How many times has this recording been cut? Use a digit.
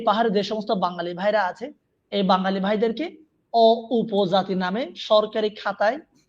0